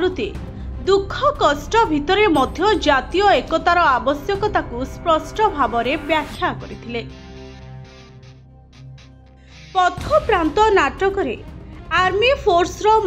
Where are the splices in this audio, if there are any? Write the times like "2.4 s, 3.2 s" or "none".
none